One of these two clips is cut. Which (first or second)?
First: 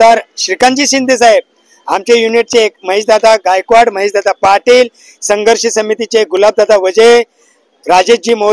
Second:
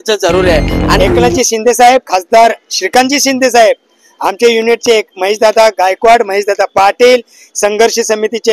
second